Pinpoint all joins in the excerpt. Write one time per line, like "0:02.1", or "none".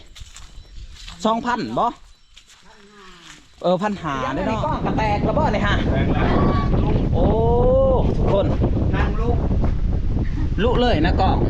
0:04.5